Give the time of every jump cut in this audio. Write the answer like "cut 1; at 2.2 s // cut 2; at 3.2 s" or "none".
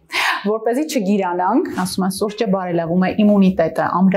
cut 1; at 1.7 s